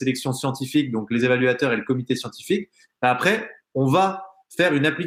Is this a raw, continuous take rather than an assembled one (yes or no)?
yes